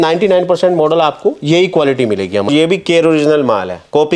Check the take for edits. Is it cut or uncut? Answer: cut